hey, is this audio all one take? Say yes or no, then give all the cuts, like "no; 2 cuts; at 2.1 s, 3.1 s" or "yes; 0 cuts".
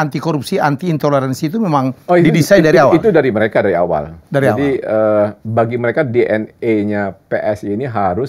yes; 0 cuts